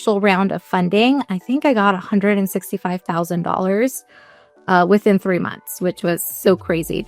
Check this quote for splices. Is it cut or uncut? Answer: uncut